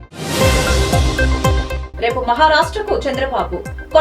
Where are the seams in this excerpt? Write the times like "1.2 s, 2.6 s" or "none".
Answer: none